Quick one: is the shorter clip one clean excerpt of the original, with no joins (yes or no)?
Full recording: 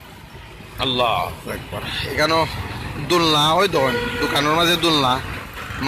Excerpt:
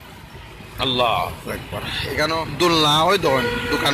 no